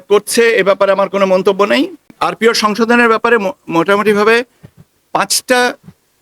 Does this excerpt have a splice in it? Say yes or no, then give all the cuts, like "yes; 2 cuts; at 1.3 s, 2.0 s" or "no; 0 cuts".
yes; 1 cut; at 2.2 s